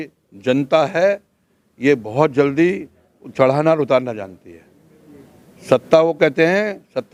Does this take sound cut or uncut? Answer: uncut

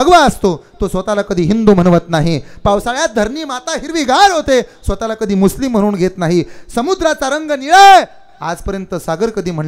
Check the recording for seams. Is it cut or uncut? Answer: uncut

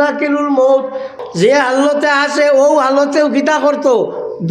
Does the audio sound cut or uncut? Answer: cut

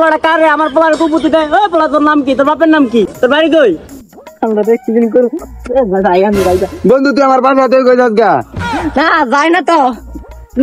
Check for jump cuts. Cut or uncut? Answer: uncut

